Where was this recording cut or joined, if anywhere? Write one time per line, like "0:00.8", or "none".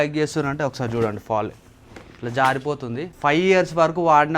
0:03.1